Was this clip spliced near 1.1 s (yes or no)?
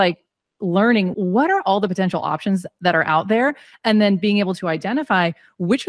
yes